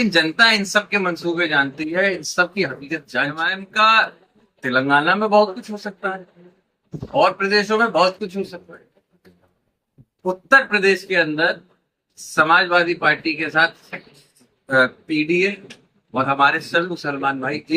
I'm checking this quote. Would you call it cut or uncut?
cut